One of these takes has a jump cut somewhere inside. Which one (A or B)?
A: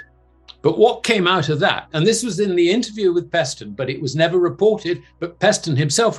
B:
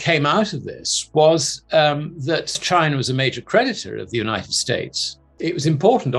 B